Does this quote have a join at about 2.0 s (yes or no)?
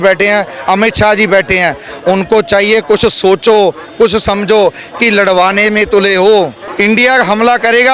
no